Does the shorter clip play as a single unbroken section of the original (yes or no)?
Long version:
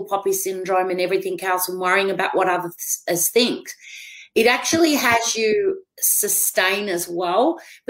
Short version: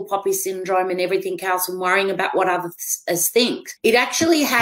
no